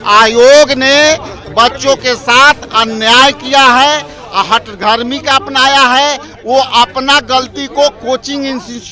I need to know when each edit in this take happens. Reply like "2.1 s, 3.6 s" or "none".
none